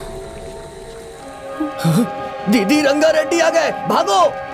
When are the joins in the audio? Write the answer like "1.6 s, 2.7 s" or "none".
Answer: 1.3 s